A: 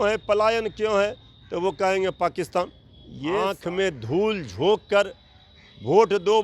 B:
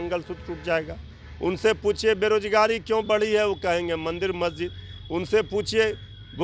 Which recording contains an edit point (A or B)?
A